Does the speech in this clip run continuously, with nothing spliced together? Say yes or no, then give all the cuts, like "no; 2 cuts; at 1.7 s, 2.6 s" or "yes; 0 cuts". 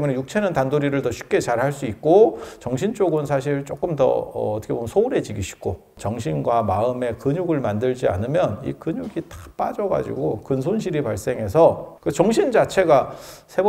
no; 2 cuts; at 5.9 s, 11.9 s